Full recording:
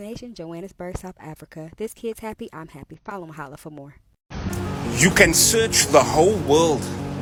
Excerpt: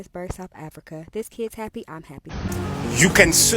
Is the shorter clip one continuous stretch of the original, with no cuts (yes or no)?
no